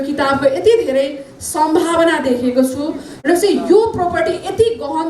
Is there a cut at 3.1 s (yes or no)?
yes